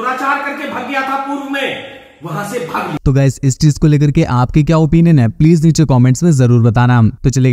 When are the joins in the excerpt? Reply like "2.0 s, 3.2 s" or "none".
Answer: none